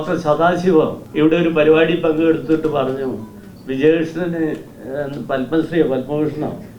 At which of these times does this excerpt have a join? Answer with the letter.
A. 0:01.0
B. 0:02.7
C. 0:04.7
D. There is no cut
A